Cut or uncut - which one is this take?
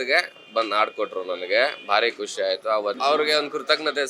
cut